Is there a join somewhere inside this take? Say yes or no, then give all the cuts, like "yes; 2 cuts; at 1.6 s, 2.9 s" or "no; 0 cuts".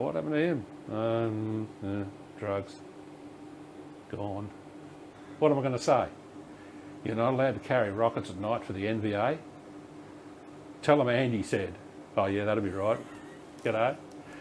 yes; 1 cut; at 5.1 s